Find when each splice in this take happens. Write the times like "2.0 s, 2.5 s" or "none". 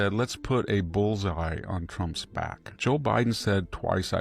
2.6 s